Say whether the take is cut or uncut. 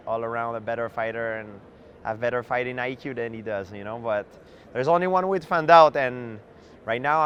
uncut